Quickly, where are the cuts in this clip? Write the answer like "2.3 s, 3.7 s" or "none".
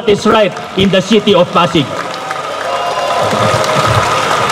none

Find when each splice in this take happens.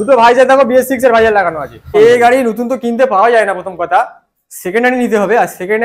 1.9 s

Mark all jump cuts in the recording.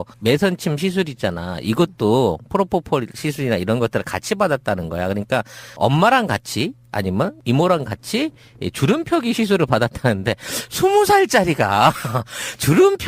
none

